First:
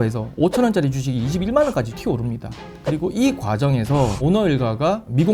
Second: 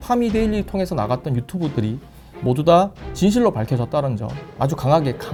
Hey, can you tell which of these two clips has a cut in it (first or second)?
first